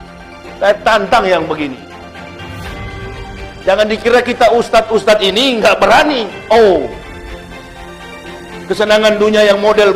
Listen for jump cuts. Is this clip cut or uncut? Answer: uncut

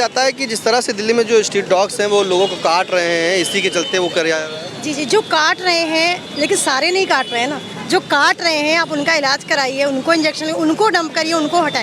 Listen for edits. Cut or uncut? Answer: uncut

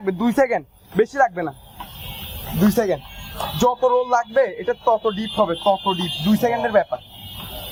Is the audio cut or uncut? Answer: uncut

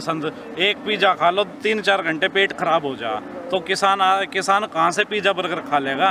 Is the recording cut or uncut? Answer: uncut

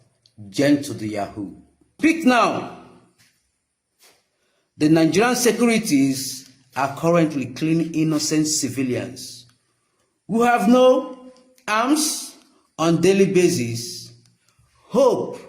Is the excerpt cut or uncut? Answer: cut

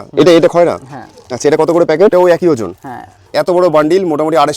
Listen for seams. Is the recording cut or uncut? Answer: cut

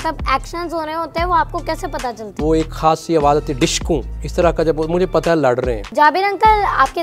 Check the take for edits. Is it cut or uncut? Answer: cut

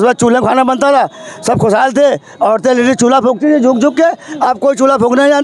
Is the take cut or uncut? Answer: uncut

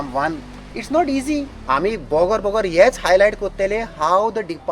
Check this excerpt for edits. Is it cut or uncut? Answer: cut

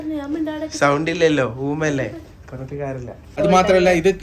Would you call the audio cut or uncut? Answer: cut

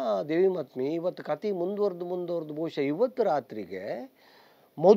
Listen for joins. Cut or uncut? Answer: uncut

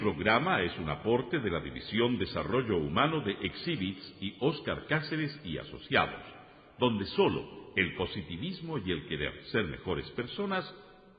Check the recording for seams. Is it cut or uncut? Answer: uncut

